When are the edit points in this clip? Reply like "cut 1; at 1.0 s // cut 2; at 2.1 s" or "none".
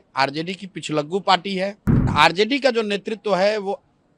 cut 1; at 2.1 s